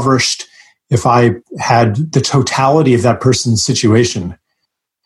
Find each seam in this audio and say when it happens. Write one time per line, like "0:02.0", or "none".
0:02.0